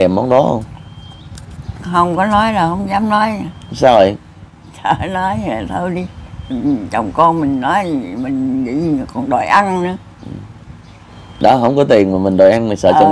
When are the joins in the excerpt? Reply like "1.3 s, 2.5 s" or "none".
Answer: none